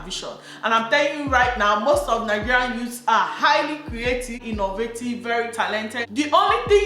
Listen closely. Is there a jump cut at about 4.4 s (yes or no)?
yes